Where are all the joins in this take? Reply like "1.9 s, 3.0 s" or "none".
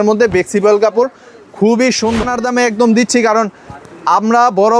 2.2 s